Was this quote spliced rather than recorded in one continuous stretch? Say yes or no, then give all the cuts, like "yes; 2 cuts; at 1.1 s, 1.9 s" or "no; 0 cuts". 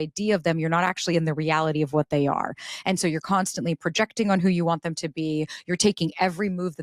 no; 0 cuts